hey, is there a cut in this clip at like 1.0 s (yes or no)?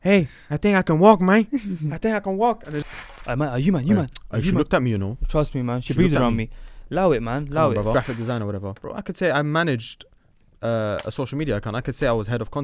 no